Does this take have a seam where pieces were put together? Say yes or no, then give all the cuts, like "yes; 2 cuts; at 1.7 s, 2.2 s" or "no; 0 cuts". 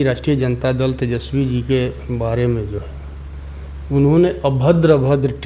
no; 0 cuts